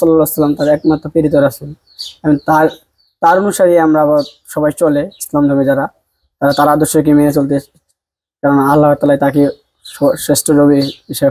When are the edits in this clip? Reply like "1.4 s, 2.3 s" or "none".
none